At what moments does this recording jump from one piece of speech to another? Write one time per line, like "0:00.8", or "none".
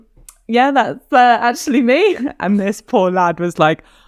none